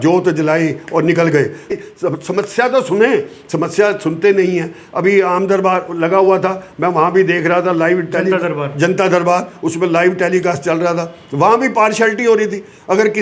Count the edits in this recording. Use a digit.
1